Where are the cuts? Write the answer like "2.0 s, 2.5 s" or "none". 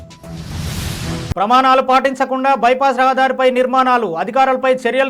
1.3 s